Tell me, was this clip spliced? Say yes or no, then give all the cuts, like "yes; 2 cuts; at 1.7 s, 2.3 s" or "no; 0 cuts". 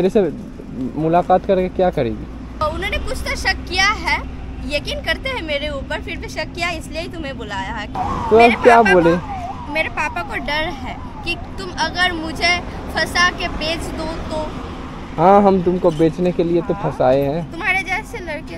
yes; 2 cuts; at 2.6 s, 7.9 s